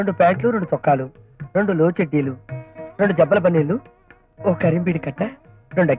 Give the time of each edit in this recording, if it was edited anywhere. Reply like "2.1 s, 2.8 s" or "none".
none